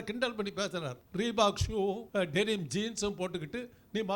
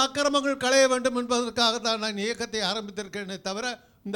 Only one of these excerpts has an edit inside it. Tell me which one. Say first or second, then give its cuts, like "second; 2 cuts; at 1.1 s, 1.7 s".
first; 2 cuts; at 1.0 s, 2.0 s